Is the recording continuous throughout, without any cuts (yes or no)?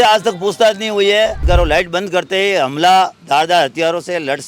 no